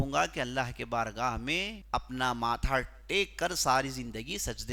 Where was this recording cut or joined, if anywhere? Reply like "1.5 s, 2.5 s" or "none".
1.8 s